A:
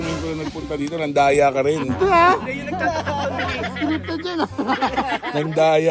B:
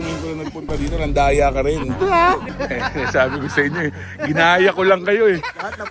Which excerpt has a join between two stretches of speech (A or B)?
B